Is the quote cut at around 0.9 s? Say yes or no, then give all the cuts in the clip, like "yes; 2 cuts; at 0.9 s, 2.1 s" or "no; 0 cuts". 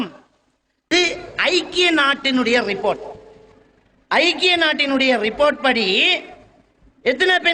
yes; 1 cut; at 0.9 s